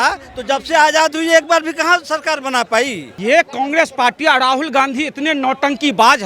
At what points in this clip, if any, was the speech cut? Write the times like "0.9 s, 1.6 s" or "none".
3.1 s

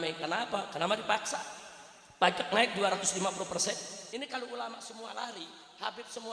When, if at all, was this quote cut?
4.0 s

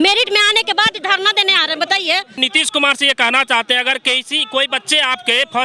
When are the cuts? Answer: 2.4 s

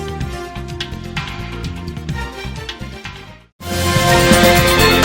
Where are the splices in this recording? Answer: 2.0 s, 3.6 s

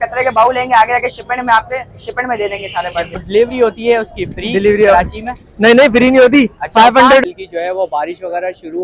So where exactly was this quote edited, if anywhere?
3.2 s, 7.2 s

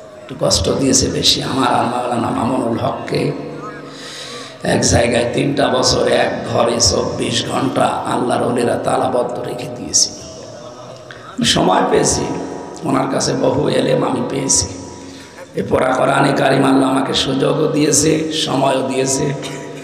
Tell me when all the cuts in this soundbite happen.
none

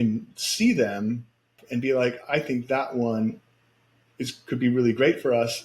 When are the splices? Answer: 1.6 s

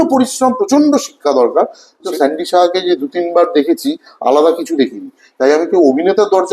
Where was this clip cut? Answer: 2.0 s

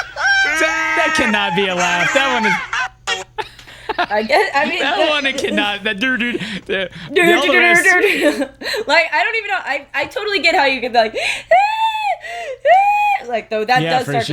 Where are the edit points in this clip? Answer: none

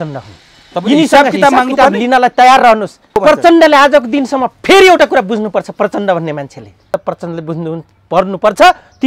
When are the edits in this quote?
3.2 s, 6.9 s

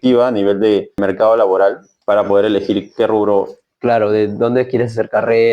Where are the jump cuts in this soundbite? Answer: 1.0 s, 1.9 s

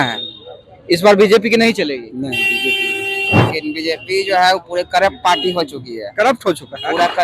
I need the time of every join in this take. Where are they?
3.4 s

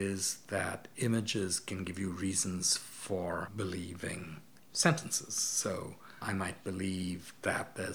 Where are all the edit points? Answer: none

